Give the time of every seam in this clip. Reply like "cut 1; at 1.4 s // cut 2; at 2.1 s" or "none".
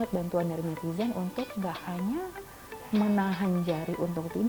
none